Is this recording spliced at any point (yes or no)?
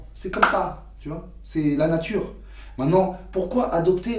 no